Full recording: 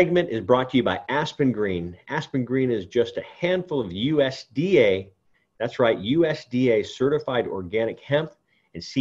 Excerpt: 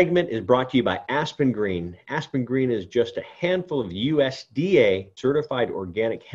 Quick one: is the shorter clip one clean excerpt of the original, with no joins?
no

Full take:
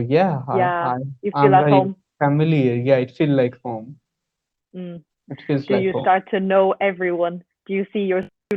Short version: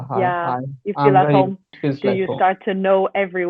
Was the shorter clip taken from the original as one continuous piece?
no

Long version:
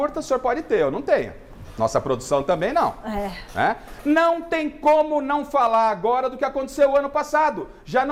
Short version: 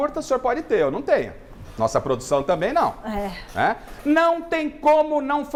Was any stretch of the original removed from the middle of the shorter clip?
no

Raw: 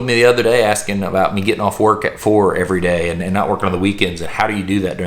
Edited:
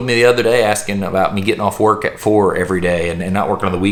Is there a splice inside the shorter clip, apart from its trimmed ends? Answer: no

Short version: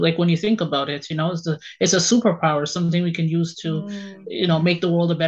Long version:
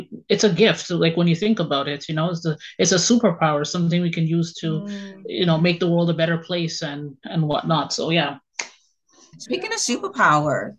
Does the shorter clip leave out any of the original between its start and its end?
no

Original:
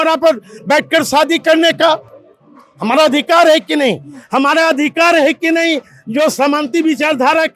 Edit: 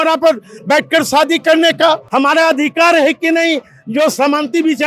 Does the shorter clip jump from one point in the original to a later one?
yes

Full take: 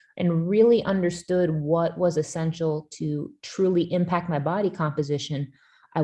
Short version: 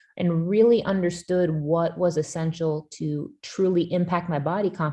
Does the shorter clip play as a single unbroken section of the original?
yes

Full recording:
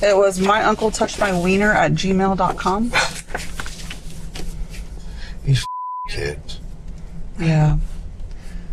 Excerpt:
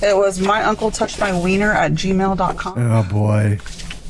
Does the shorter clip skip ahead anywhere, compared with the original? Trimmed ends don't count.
no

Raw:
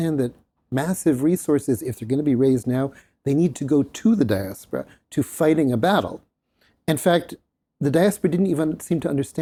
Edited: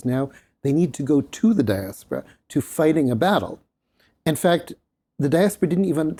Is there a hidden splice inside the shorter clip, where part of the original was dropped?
no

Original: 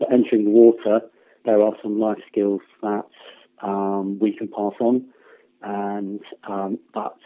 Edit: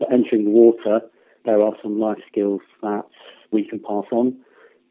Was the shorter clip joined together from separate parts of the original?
yes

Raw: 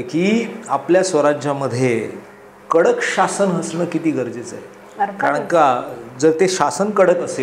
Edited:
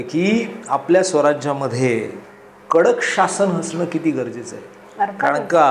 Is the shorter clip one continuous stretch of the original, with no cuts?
yes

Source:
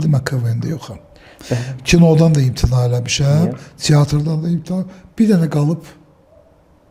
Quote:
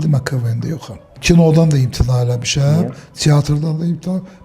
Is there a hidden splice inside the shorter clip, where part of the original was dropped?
yes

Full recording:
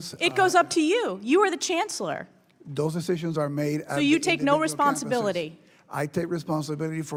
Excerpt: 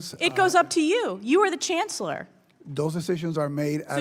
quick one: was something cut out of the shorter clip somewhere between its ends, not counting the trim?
no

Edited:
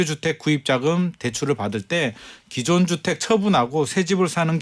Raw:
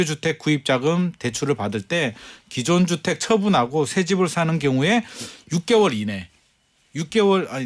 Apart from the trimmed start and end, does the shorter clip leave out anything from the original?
no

